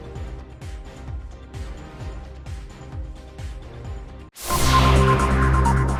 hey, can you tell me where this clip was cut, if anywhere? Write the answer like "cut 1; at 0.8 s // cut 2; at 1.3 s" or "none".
none